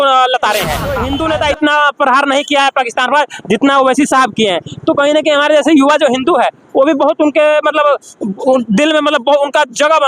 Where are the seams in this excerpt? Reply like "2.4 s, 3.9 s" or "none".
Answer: 0.9 s

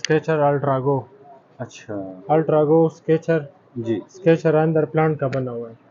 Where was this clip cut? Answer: none

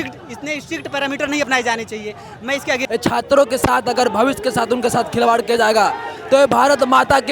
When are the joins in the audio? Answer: 2.8 s

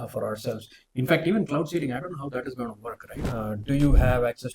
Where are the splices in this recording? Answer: 3.1 s

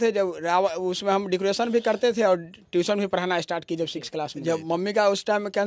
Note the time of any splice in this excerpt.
4.6 s

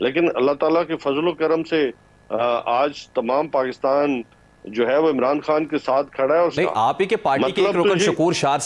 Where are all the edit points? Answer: 6.5 s

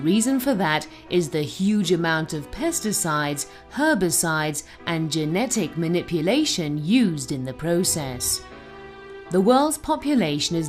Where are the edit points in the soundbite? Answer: none

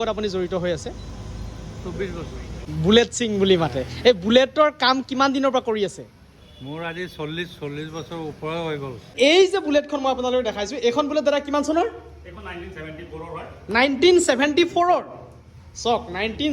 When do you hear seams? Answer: 2.6 s, 9.1 s

